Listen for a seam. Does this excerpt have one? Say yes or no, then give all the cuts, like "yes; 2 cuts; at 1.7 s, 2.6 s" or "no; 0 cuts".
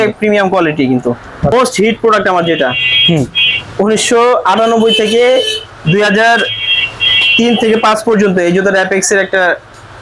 yes; 1 cut; at 1.5 s